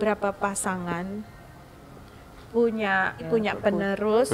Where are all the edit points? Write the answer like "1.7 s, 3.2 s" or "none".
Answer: 3.3 s